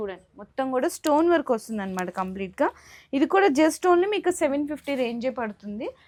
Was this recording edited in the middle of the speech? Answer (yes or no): no